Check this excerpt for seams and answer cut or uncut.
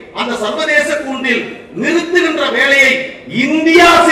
uncut